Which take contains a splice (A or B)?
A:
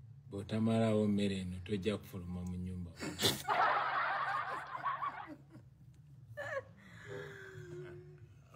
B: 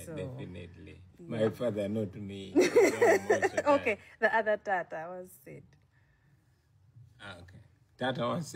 A